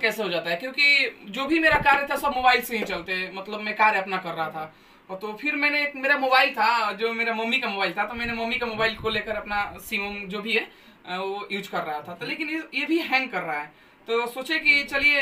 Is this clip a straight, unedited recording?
yes; 0 cuts

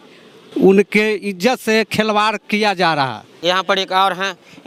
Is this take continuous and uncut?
yes; 0 cuts

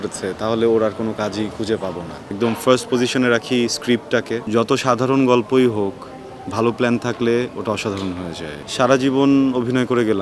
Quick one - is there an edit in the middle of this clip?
yes; 3 cuts; at 2.2 s, 4.4 s, 8.6 s

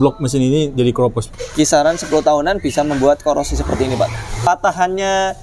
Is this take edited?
yes; 2 cuts; at 1.3 s, 4.5 s

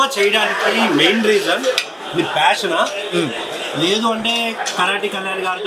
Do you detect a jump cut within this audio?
no; 0 cuts

